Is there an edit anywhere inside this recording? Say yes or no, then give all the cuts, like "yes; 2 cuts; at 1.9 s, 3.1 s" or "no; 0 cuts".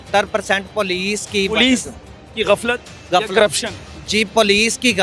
no; 0 cuts